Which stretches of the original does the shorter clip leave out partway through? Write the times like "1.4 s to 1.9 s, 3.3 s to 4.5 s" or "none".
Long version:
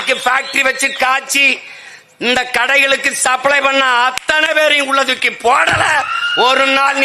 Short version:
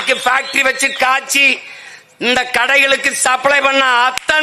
none